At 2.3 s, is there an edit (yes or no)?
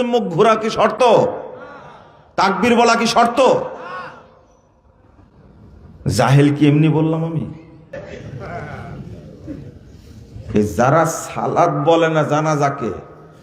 no